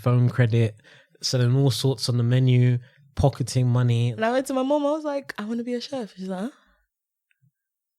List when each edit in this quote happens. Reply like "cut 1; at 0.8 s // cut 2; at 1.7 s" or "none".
cut 1; at 4.1 s